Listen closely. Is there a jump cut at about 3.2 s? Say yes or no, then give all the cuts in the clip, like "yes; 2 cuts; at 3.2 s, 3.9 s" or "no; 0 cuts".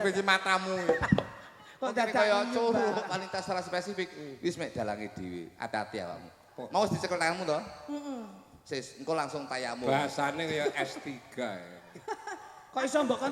yes; 1 cut; at 3.2 s